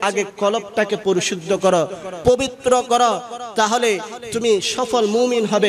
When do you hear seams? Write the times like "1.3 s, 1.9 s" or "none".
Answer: none